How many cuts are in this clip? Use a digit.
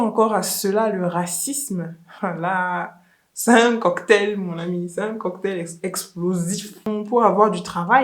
1